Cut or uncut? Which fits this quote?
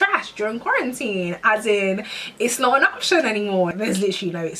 cut